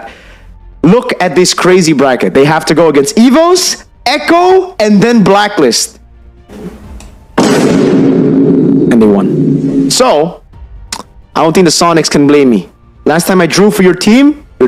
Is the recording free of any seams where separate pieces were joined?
yes; 0 cuts

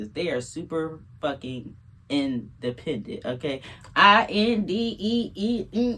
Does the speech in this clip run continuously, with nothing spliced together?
yes; 0 cuts

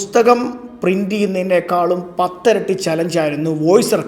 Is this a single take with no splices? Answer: yes; 0 cuts

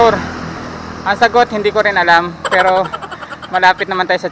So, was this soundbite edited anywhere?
no; 0 cuts

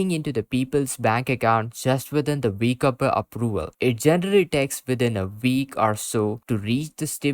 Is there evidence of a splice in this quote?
yes; 1 cut; at 3.7 s

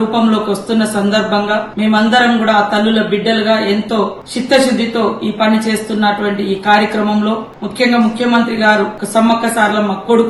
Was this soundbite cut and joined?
no; 0 cuts

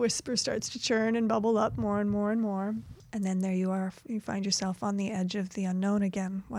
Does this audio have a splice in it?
no; 0 cuts

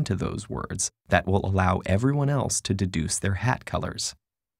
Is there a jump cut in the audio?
no; 0 cuts

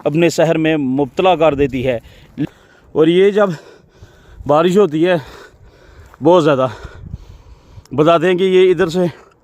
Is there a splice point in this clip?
yes; 1 cut; at 2.4 s

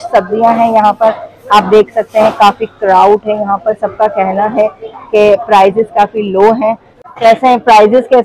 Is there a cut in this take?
yes; 1 cut; at 6.9 s

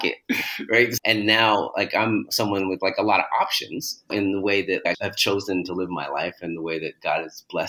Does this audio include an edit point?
yes; 1 cut; at 1.0 s

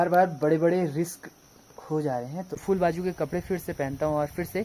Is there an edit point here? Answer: yes; 1 cut; at 2.5 s

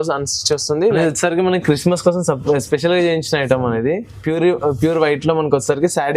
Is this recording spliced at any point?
yes; 1 cut; at 1.0 s

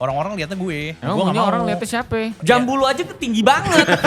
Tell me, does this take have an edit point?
yes; 2 cuts; at 0.9 s, 2.4 s

